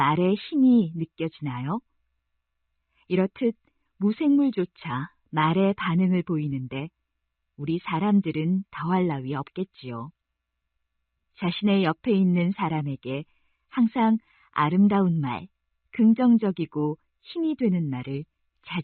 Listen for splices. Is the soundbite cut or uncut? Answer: uncut